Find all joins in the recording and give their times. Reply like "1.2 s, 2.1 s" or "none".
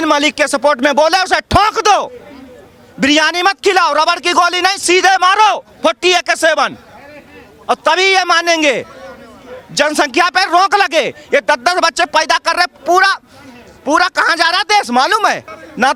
none